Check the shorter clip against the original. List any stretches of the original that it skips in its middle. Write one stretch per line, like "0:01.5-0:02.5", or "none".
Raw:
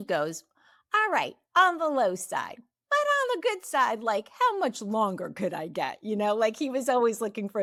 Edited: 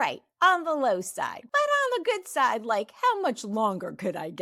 0:02.5-0:02.8